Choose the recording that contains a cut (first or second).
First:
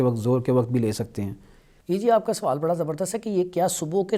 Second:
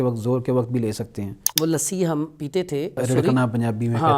second